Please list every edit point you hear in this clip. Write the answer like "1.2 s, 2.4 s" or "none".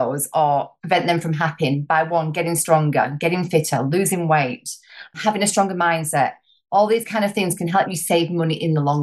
5.1 s, 7.9 s